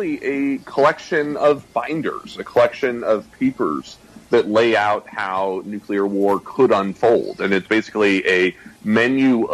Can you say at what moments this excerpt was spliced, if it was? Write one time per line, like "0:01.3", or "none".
none